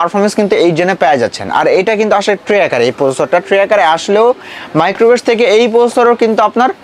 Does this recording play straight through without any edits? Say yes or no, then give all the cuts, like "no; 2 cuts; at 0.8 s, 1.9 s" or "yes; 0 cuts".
yes; 0 cuts